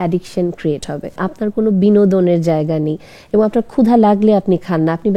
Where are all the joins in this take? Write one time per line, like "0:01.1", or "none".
0:01.2